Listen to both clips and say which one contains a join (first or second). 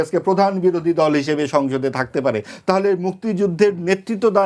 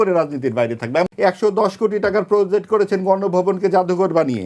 second